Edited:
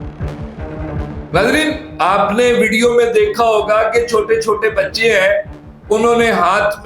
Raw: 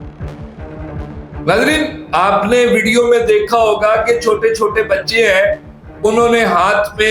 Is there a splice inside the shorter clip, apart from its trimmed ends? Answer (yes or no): yes